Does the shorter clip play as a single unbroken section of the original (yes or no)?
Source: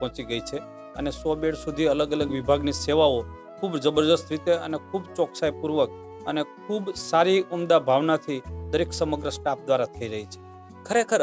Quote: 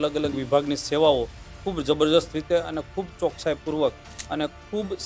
yes